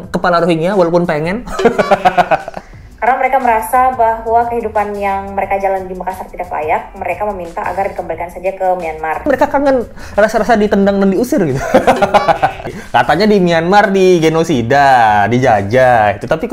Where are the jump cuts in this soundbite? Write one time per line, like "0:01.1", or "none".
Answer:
0:02.6
0:09.3
0:12.7